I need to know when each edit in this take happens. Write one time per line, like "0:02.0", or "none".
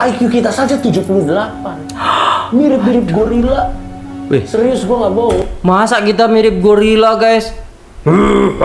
none